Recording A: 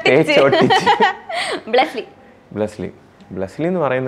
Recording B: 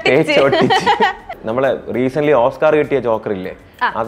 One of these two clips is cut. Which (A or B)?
B